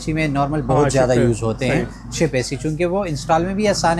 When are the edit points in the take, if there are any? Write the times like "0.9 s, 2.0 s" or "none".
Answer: none